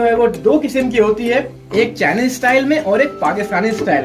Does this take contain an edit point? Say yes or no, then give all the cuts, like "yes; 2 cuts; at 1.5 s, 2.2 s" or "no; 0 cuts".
no; 0 cuts